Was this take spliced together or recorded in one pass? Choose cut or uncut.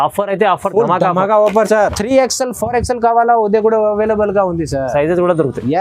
cut